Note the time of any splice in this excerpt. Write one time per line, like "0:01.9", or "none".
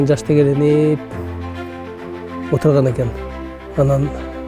0:03.2